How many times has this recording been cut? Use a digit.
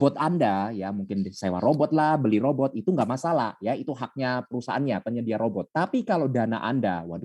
1